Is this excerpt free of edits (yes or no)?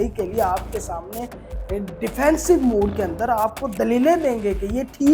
yes